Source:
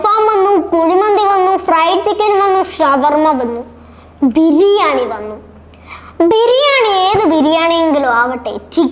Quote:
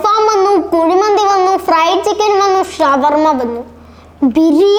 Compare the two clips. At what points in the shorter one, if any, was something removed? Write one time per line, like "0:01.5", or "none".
none